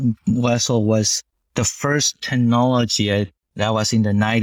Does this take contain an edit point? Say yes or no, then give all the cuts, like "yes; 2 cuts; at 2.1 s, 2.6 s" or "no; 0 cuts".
yes; 1 cut; at 3.4 s